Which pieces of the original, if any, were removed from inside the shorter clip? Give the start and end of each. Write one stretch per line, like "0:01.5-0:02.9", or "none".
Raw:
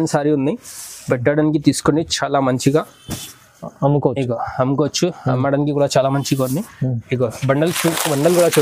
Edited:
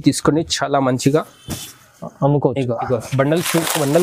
0:04.5-0:07.2